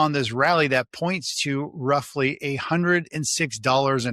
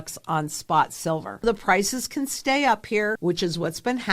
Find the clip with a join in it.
second; 2 cuts; at 1.4 s, 3.2 s

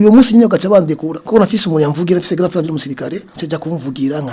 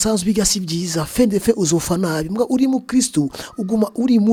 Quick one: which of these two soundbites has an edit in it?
first; 2 cuts; at 1.1 s, 3.3 s

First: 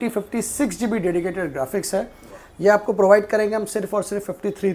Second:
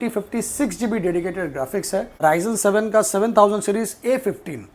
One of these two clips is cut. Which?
second; 1 cut; at 2.1 s

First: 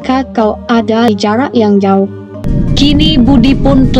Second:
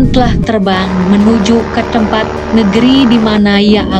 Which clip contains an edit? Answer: first; 1 cut; at 2.4 s

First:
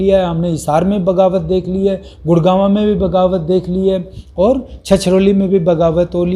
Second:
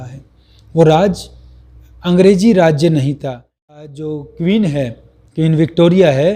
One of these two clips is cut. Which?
second; 1 cut; at 3.8 s

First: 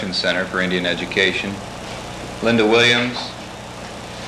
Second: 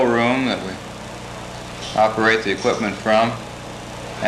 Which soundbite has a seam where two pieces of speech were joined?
first; 1 cut; at 3.1 s

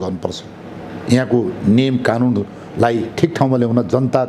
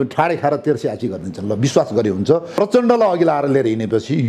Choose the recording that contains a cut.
second; 1 cut; at 2.5 s

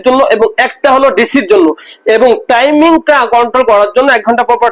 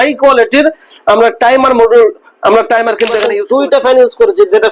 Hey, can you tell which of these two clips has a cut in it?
second; 1 cut; at 3.3 s

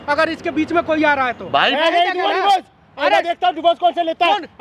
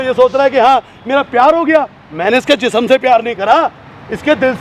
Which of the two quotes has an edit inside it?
first; 1 cut; at 1.7 s

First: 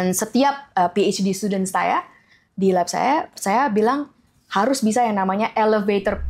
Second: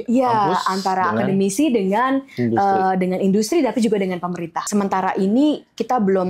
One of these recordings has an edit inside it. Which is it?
second; 1 cut; at 4.6 s

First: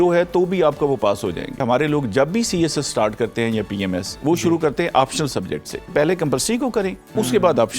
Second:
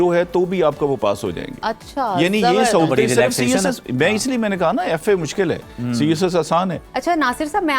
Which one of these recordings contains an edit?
first; 2 cuts; at 1.6 s, 5.9 s

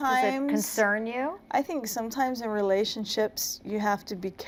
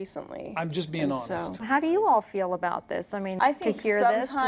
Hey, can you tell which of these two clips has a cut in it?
second; 1 cut; at 3.3 s

